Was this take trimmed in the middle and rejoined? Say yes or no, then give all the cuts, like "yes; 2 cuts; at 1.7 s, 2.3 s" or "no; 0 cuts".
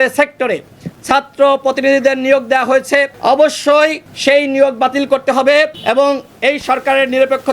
yes; 3 cuts; at 3.1 s, 4.1 s, 5.8 s